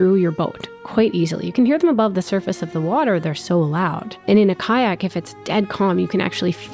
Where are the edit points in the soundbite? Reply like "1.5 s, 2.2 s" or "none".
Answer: 4.3 s